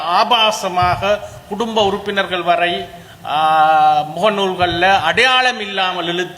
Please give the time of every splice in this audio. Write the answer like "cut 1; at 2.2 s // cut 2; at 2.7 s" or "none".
none